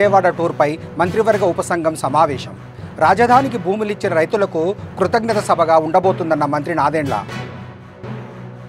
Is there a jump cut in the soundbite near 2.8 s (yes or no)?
no